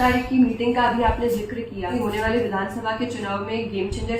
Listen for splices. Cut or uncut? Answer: cut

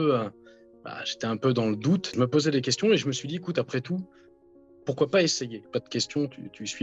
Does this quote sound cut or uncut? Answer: cut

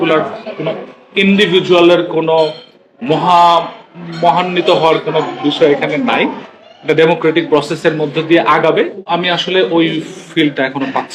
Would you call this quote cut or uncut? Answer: cut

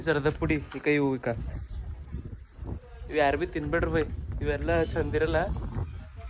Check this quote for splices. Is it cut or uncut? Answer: uncut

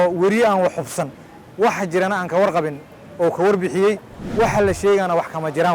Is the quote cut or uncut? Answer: cut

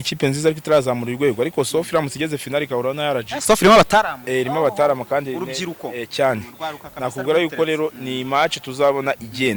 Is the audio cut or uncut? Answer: uncut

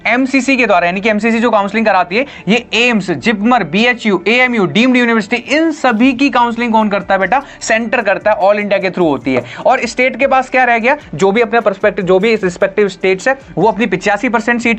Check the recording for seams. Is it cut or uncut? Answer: uncut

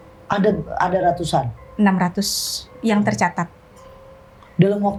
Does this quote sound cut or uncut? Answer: uncut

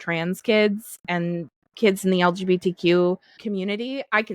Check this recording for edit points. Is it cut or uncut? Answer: cut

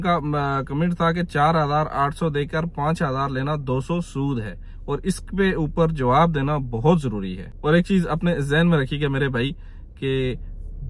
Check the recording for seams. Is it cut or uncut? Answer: cut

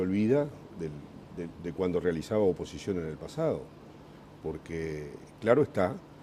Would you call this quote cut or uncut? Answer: cut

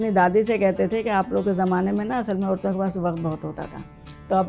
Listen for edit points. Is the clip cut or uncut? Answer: uncut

